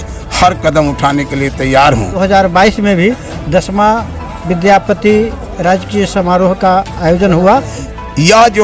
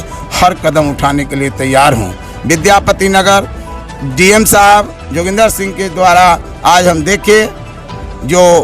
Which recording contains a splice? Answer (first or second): first